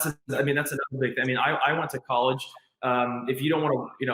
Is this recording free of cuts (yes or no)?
yes